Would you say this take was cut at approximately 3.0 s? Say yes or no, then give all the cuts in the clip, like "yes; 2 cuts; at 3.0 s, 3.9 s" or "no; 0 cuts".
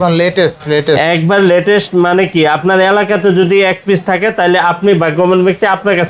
no; 0 cuts